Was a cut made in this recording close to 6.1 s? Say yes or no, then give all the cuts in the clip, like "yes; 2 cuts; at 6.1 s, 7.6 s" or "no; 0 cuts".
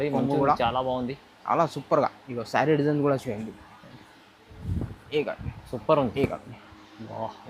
yes; 1 cut; at 6.1 s